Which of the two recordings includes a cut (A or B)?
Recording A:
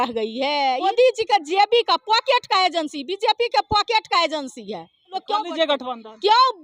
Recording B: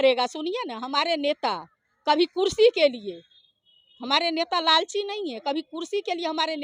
A